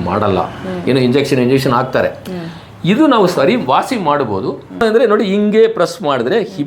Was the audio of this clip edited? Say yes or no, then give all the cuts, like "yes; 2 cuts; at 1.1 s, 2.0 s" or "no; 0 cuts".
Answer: yes; 1 cut; at 4.8 s